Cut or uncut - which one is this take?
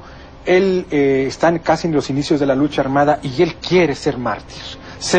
cut